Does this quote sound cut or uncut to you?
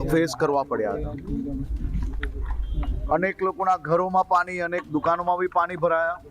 uncut